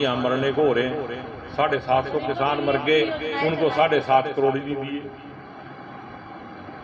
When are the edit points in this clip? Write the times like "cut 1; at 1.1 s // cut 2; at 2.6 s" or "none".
cut 1; at 5.2 s